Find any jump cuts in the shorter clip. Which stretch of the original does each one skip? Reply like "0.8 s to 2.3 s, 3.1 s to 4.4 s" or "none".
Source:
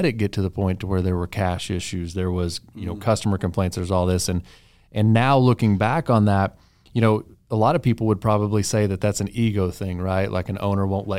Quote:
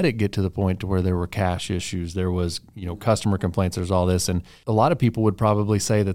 4.5 s to 7.4 s